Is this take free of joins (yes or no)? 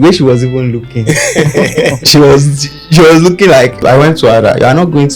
no